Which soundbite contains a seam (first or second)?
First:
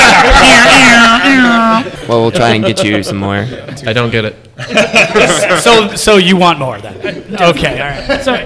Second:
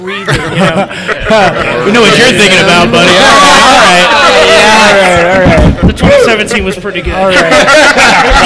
first